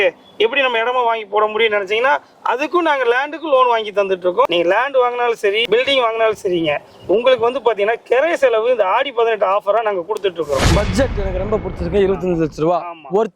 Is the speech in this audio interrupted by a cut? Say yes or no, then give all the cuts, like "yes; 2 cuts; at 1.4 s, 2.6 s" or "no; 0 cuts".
yes; 3 cuts; at 4.5 s, 5.6 s, 10.6 s